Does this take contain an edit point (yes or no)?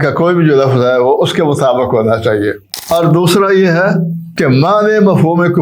yes